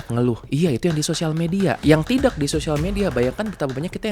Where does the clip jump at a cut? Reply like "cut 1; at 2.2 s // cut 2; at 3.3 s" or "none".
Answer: cut 1; at 1.8 s

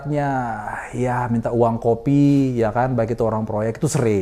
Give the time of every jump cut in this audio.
none

